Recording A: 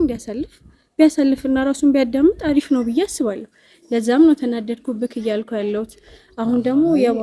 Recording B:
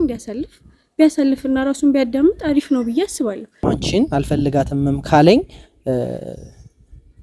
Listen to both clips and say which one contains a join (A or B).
B